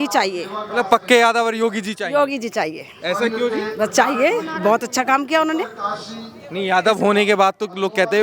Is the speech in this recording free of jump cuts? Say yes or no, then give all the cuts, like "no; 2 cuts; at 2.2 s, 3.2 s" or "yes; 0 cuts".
yes; 0 cuts